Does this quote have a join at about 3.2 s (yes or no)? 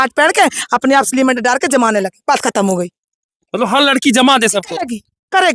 no